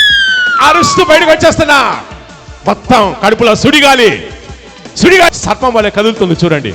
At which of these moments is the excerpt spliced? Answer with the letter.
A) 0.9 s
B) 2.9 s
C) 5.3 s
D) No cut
C